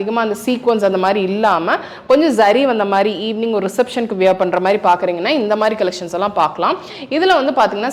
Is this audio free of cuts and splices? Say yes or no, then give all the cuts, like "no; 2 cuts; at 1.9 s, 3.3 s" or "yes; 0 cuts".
yes; 0 cuts